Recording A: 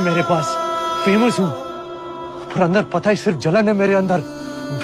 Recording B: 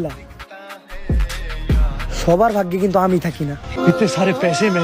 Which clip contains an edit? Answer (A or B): B